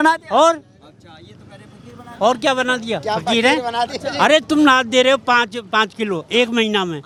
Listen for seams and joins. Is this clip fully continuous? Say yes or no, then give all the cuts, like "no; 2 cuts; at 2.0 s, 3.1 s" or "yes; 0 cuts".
yes; 0 cuts